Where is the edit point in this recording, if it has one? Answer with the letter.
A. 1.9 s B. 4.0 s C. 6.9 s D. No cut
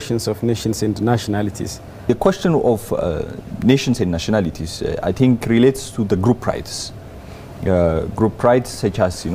A